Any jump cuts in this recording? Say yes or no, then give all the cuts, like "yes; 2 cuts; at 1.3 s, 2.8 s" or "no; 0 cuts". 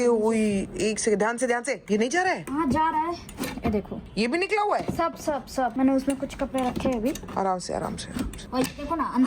yes; 2 cuts; at 4.0 s, 8.4 s